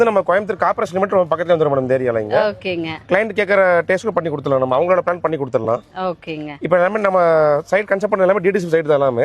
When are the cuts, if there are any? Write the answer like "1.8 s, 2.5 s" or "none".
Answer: 2.9 s